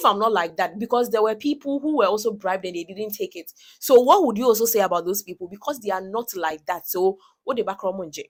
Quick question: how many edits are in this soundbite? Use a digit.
0